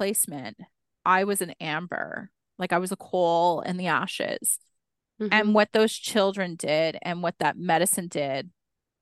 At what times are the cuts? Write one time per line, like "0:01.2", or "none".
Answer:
none